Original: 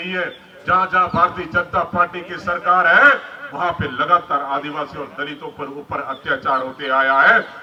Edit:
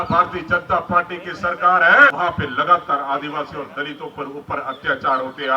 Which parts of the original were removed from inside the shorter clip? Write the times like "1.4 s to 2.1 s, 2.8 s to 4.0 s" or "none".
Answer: 3.2 s to 3.6 s